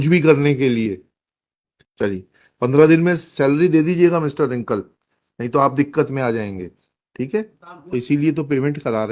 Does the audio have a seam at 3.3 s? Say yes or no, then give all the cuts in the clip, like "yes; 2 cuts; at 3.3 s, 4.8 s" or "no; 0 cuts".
no; 2 cuts; at 1.6 s, 7.6 s